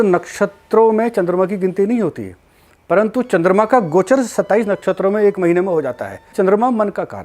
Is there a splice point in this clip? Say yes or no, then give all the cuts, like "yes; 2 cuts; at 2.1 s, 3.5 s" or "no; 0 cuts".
yes; 1 cut; at 6.3 s